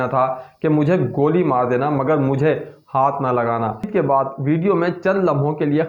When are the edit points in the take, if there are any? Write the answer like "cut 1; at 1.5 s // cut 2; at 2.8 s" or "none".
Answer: cut 1; at 3.9 s